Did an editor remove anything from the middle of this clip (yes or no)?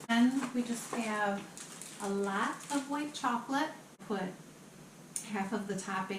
yes